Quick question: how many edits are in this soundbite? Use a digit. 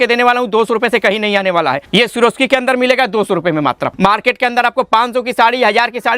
2